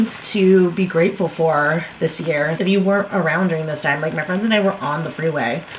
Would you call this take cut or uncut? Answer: uncut